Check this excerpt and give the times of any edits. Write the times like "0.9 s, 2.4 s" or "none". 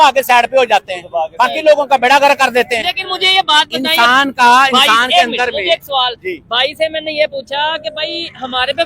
none